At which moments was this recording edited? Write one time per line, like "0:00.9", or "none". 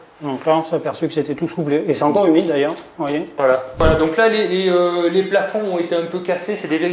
0:03.8